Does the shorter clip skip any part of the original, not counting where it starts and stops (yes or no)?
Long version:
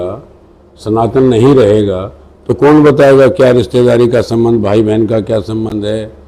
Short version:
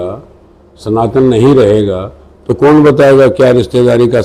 no